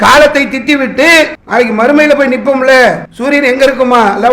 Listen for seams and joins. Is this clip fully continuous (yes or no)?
no